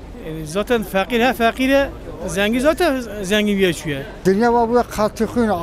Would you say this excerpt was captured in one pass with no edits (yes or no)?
no